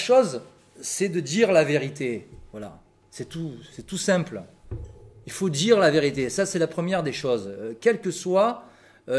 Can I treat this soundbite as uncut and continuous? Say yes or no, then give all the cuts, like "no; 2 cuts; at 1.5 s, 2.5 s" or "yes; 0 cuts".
yes; 0 cuts